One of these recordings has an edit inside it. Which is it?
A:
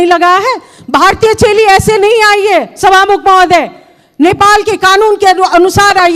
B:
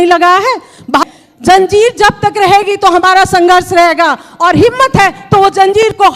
B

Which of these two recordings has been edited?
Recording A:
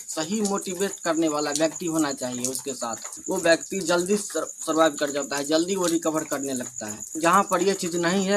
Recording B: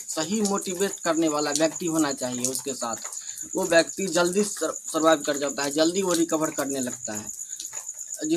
A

